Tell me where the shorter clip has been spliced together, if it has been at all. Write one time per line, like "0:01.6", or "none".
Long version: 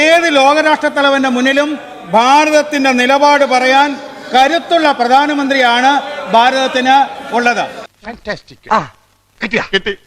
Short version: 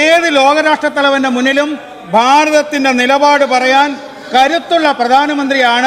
none